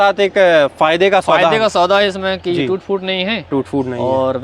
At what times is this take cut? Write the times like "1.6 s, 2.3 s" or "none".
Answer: none